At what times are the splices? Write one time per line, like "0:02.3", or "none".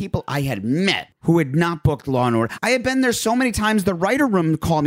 0:01.1
0:02.7